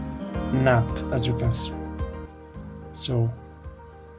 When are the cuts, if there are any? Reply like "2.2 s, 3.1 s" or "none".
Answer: none

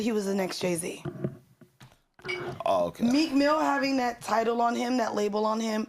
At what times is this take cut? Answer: 1.3 s

